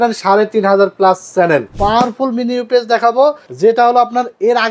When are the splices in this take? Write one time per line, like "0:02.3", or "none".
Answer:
0:01.7
0:03.5